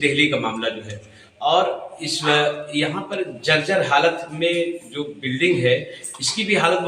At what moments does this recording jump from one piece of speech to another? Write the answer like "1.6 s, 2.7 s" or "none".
none